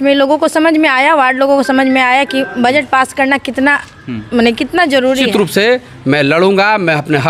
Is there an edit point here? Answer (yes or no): yes